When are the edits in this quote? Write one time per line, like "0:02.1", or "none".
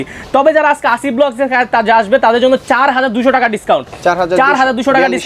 none